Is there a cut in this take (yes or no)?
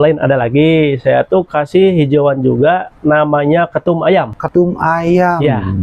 yes